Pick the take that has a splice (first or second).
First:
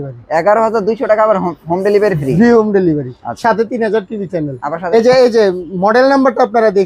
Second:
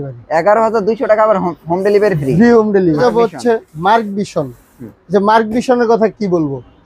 second